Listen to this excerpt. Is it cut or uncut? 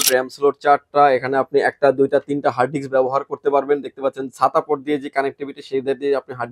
uncut